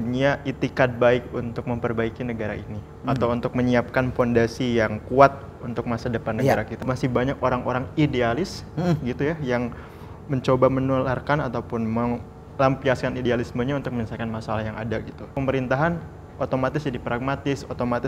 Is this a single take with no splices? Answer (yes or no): no